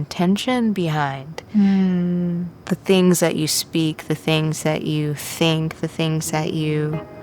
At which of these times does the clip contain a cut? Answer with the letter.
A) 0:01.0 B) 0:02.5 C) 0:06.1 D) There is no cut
B